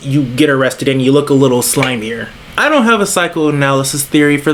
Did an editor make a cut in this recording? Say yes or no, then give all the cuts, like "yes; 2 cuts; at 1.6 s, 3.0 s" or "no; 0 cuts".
no; 0 cuts